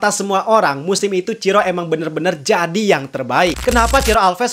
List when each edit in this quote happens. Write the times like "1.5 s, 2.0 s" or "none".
3.6 s